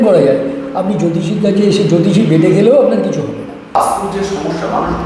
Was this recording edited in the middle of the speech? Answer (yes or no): yes